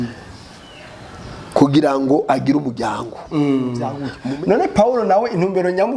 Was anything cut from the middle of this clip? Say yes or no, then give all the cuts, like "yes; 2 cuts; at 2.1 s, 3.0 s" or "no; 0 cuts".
yes; 1 cut; at 4.0 s